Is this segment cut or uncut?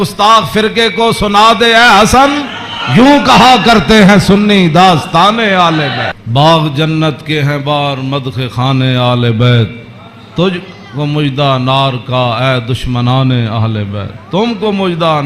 cut